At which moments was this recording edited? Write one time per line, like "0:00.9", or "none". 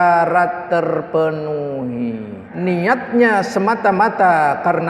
0:02.4